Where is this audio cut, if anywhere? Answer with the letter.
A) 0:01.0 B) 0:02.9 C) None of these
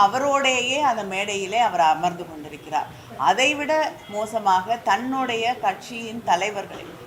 C